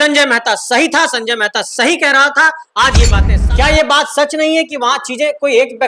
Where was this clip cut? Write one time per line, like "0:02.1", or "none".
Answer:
0:03.3